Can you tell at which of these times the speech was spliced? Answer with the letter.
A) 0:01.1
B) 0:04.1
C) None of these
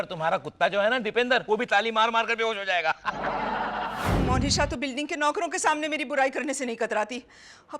B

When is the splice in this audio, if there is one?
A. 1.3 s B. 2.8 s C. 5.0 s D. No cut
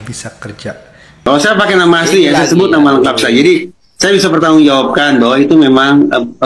A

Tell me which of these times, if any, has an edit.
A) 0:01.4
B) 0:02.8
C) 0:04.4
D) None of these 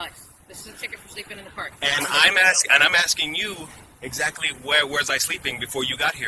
D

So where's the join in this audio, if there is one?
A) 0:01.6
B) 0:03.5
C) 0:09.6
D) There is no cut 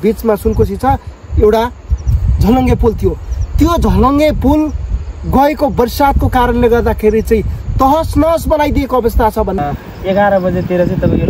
C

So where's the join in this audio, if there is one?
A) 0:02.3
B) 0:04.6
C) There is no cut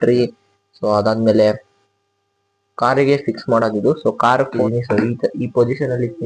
B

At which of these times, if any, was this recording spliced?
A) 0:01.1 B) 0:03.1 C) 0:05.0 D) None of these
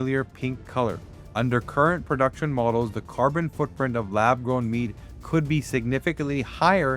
A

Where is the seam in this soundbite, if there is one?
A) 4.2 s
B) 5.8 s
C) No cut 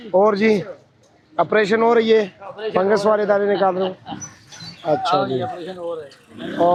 C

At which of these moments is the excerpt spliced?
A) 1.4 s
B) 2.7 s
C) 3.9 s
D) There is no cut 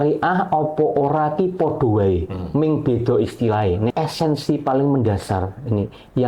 C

